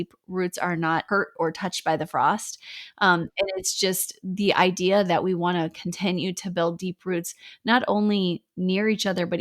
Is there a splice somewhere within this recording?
yes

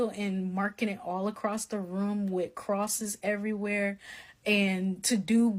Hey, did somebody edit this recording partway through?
no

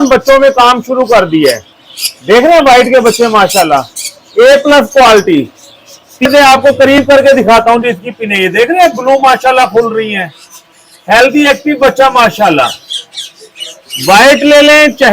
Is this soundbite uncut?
no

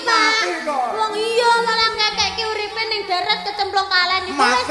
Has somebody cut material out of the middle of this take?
no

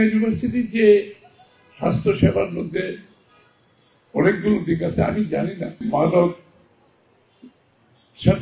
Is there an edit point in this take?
yes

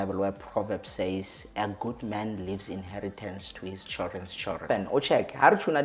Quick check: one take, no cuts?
no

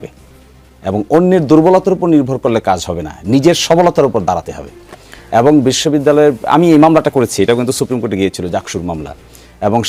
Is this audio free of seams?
yes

